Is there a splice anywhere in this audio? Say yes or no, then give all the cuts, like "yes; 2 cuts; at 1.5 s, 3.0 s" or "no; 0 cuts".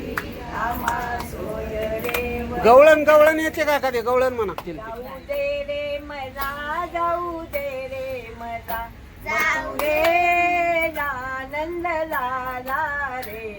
yes; 1 cut; at 4.6 s